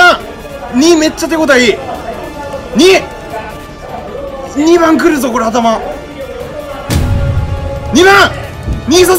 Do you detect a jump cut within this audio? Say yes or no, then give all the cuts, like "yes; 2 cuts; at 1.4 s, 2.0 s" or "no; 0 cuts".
no; 0 cuts